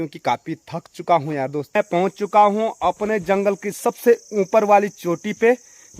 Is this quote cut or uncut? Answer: cut